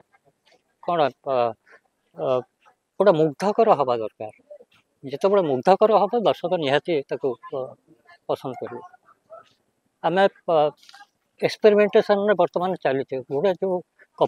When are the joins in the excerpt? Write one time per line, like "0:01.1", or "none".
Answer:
none